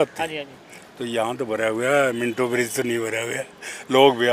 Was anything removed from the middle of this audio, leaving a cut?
no; 0 cuts

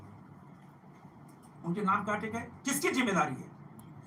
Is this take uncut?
yes; 0 cuts

